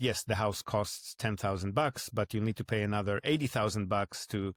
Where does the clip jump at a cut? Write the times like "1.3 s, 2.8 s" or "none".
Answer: none

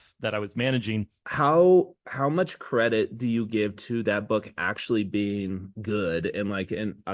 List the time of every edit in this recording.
1.2 s

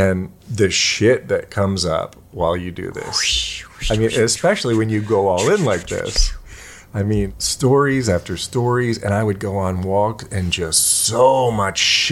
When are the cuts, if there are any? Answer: 7.4 s

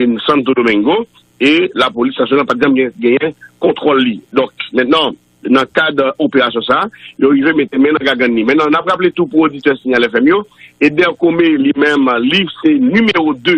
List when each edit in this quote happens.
5.7 s

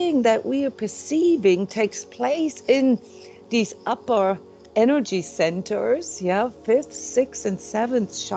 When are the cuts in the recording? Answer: none

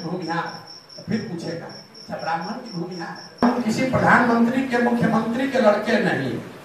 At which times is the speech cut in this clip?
3.4 s

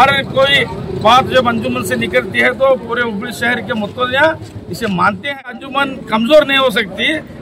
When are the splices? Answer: 5.6 s

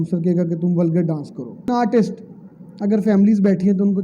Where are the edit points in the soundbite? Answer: 1.7 s

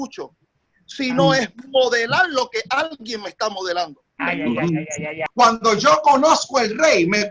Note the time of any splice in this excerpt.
5.2 s

